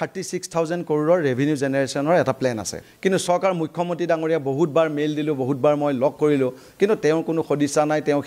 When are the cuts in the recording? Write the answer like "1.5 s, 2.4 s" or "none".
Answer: 2.8 s